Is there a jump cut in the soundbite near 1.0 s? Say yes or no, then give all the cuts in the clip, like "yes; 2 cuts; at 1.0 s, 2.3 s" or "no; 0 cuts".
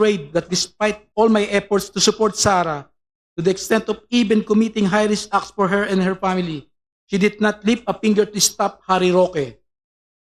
yes; 1 cut; at 1.0 s